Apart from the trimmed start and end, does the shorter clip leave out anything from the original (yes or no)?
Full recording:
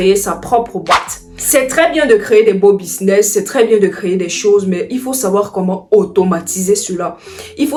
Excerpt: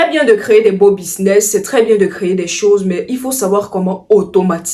no